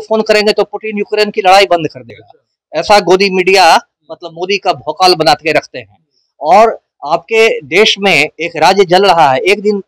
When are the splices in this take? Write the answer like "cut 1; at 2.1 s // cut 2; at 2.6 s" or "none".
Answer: none